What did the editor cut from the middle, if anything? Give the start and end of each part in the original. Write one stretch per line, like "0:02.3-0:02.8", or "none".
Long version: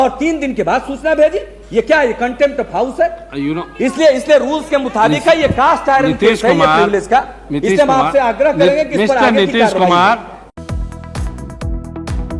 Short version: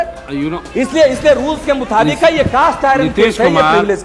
none